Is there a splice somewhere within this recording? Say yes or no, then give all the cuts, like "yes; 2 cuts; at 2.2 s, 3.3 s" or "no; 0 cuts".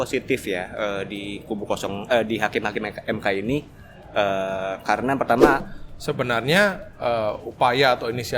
yes; 1 cut; at 5.7 s